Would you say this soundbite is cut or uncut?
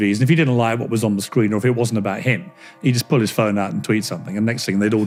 uncut